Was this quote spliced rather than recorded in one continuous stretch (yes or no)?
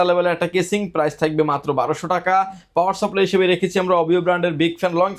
no